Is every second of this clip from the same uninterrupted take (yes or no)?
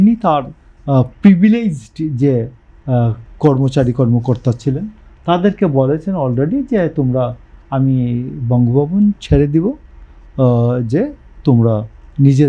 yes